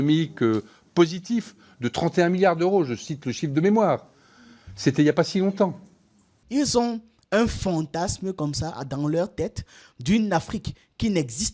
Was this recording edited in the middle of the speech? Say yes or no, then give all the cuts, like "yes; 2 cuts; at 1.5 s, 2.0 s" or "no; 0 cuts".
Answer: yes; 1 cut; at 6.4 s